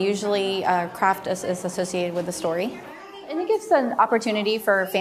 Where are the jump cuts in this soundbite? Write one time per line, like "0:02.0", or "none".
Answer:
0:03.4